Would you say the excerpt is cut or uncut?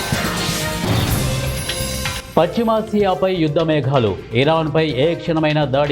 cut